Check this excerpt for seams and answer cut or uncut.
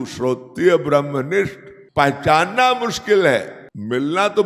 uncut